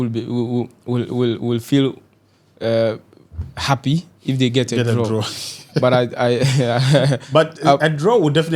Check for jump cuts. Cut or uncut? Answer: uncut